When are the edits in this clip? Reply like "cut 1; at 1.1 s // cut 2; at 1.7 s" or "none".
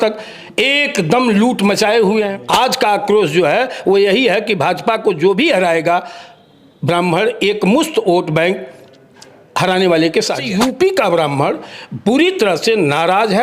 cut 1; at 2.4 s // cut 2; at 10.4 s